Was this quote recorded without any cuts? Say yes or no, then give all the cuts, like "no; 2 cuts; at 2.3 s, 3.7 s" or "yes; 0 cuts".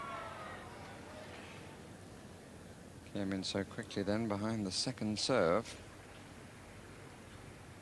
yes; 0 cuts